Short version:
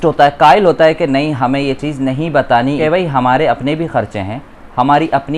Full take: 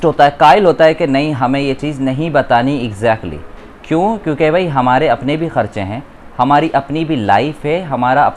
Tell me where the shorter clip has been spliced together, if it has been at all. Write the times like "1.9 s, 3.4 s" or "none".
2.8 s